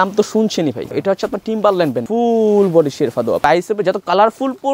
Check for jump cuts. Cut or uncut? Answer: cut